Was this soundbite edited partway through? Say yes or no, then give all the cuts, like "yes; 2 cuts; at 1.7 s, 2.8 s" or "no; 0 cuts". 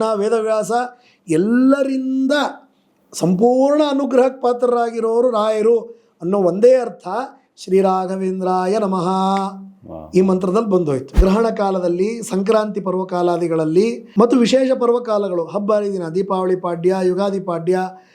yes; 2 cuts; at 11.1 s, 14.0 s